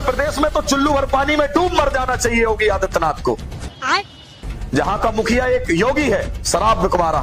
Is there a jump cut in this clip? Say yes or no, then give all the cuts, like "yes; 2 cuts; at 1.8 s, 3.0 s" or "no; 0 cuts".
no; 0 cuts